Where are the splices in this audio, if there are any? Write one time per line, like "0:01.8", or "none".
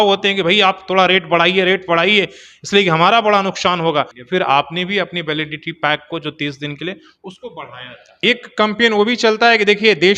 0:04.2
0:08.2